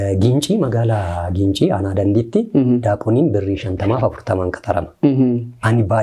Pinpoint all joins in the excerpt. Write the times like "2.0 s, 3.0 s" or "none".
none